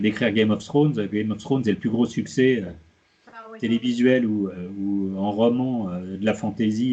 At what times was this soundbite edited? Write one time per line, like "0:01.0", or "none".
none